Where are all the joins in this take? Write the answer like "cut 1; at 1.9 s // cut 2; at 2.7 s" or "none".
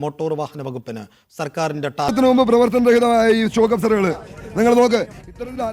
cut 1; at 2.1 s